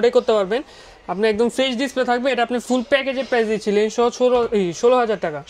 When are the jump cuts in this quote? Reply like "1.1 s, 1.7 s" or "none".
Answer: none